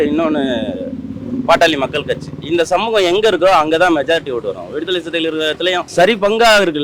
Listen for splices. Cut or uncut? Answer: cut